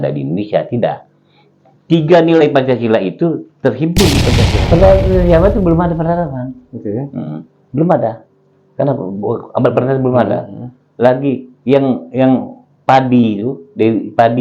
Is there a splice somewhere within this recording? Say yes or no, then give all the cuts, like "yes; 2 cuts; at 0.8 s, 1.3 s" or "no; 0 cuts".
yes; 1 cut; at 4.6 s